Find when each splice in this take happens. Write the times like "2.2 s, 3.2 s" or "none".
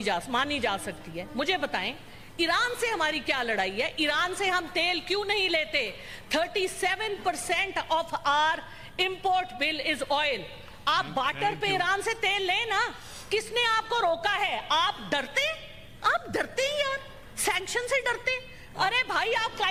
none